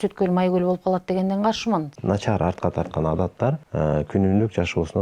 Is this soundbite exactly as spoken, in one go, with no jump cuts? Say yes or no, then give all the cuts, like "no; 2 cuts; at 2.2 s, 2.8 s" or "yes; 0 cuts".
no; 2 cuts; at 1.9 s, 3.6 s